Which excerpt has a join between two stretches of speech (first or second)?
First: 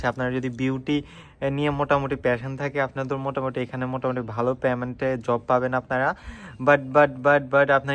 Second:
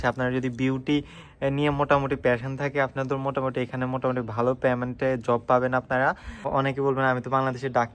second